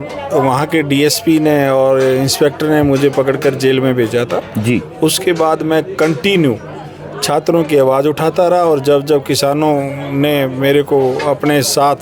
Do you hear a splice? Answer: no; 0 cuts

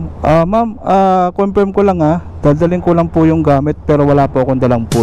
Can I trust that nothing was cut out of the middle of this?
yes; 0 cuts

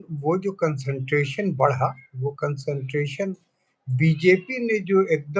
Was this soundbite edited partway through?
no; 0 cuts

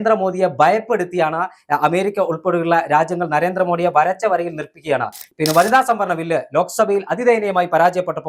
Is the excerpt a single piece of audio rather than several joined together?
no; 1 cut; at 5.3 s

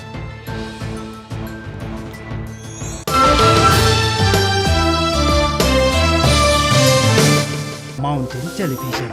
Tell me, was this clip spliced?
yes; 1 cut; at 8.0 s

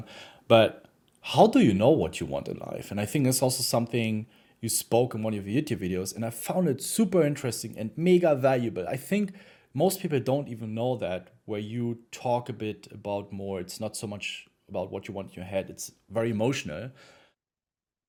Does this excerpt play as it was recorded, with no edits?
yes; 0 cuts

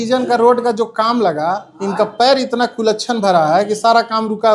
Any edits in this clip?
no; 0 cuts

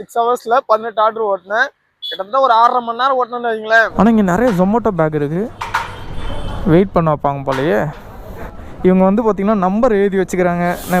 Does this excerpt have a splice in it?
yes; 1 cut; at 3.9 s

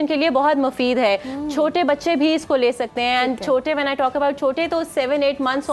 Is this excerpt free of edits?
yes; 0 cuts

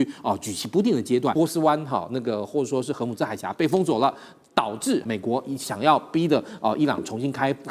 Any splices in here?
yes; 2 cuts; at 1.3 s, 5.0 s

